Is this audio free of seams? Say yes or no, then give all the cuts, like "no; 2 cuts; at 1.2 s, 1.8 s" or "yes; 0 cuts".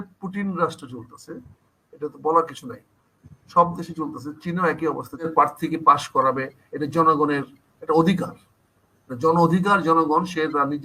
no; 1 cut; at 5.3 s